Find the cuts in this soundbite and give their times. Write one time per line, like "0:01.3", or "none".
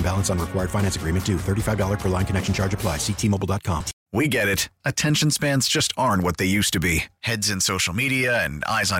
0:04.0